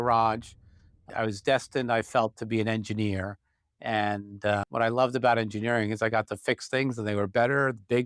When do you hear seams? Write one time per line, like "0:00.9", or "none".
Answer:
0:01.1
0:04.6